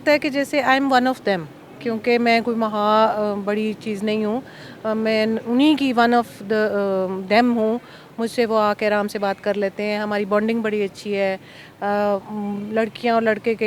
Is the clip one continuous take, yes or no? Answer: yes